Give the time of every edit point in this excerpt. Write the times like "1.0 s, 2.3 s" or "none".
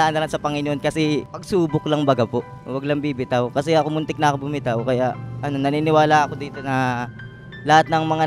1.4 s, 2.6 s